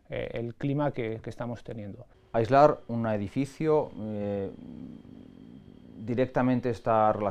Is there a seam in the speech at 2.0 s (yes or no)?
yes